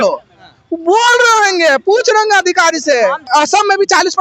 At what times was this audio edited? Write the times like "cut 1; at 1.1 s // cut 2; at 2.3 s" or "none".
cut 1; at 3.2 s

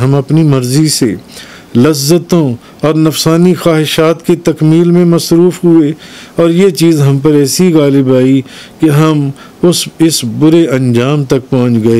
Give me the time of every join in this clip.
none

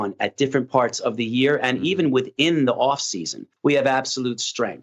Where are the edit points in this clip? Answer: cut 1; at 3.5 s

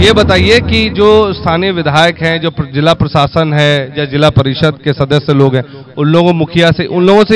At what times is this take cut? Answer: none

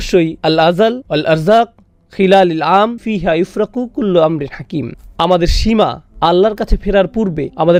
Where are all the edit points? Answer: none

